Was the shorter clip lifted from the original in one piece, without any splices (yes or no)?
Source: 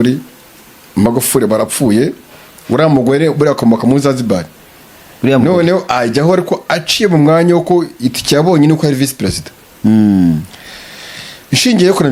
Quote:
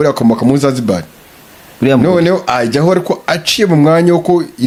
yes